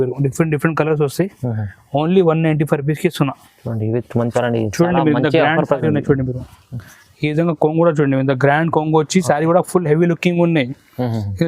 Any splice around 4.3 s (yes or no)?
yes